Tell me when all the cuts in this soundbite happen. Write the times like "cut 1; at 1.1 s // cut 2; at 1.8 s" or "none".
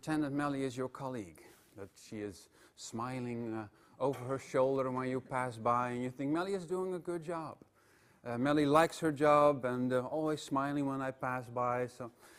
none